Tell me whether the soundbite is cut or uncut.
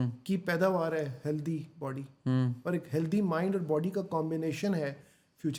uncut